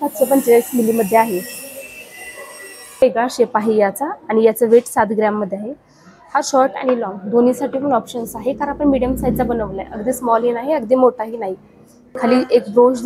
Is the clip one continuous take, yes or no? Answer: no